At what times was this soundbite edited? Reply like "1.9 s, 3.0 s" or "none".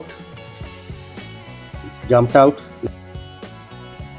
none

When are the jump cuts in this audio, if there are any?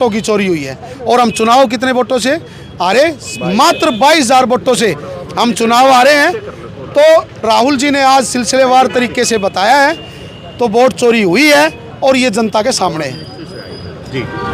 none

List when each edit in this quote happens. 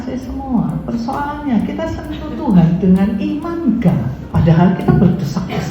4.2 s

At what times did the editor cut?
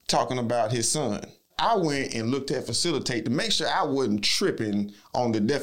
1.4 s

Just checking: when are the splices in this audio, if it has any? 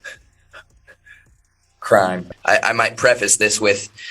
2.3 s

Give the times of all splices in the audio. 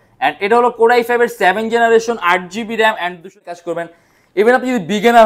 3.5 s

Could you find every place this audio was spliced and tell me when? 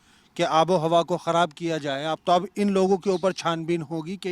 2.2 s

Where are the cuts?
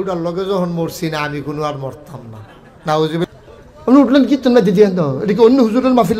3.3 s

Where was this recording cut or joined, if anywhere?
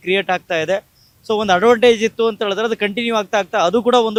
none

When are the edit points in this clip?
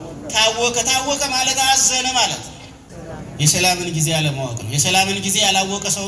3.0 s

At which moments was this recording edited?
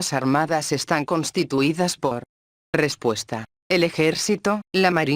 1.9 s, 3.7 s

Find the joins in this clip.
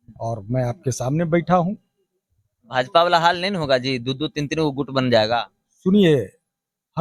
none

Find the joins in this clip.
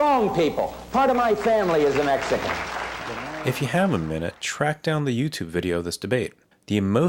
none

